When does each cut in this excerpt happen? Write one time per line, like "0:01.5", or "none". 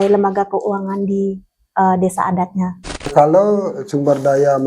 0:03.1